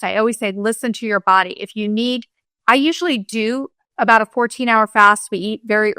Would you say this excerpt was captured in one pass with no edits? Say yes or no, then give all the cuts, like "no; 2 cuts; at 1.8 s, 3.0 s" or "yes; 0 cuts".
no; 1 cut; at 3.8 s